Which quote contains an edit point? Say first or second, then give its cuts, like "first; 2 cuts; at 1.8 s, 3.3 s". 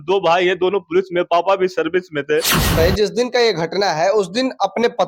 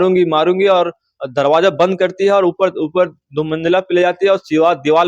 first; 1 cut; at 2.8 s